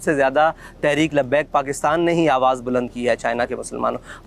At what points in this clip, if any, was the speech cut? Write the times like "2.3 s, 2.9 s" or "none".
none